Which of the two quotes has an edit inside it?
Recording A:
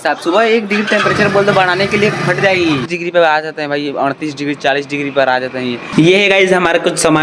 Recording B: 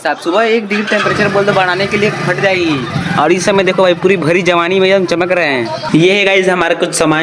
A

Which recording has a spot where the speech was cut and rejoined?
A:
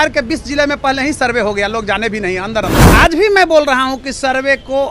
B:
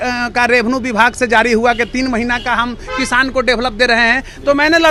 A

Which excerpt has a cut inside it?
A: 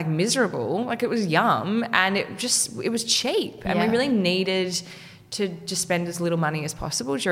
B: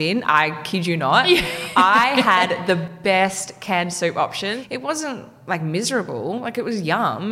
B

